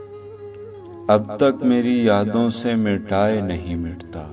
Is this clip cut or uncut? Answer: uncut